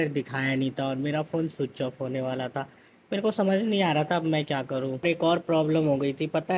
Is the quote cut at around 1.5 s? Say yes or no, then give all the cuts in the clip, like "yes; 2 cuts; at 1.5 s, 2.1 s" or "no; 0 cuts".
no; 1 cut; at 5.0 s